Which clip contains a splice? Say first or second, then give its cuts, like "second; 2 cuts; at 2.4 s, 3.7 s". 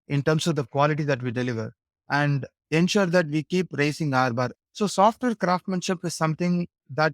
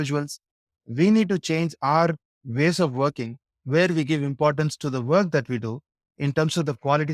first; 1 cut; at 4.5 s